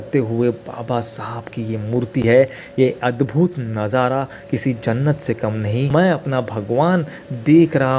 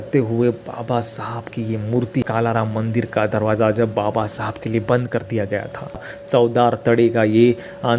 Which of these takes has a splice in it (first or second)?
second